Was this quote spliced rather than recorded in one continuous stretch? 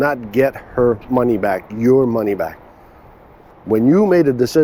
no; 0 cuts

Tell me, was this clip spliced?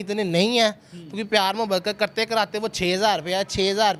no; 0 cuts

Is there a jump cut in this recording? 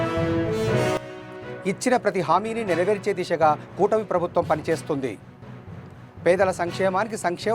yes; 1 cut; at 1.0 s

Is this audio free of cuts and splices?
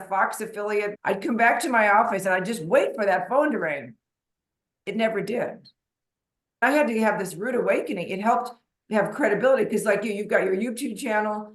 no; 2 cuts; at 0.9 s, 6.6 s

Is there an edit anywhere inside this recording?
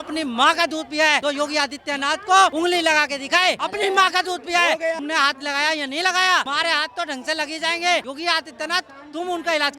yes; 6 cuts; at 1.2 s, 2.5 s, 3.6 s, 5.0 s, 6.5 s, 8.1 s

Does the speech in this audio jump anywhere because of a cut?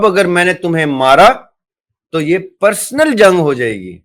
no; 0 cuts

